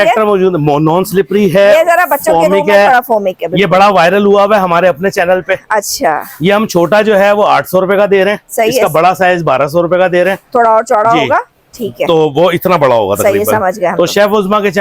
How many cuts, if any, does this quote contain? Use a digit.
0